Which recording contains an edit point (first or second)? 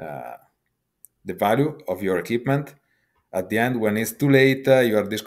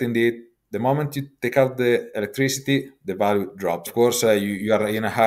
second